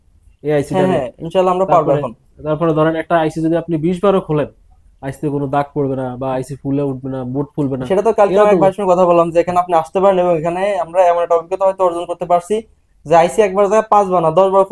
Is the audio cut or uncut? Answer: uncut